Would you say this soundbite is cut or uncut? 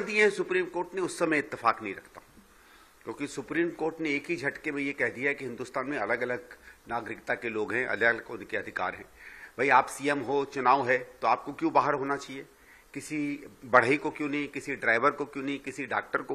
uncut